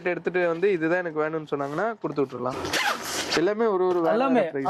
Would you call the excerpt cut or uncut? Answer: cut